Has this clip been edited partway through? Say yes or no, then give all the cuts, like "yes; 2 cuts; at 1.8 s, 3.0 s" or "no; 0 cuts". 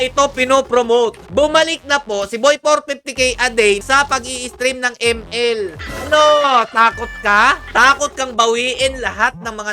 yes; 4 cuts; at 1.2 s, 3.8 s, 5.9 s, 7.6 s